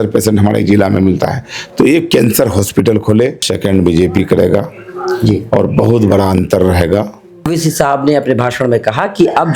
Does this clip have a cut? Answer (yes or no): yes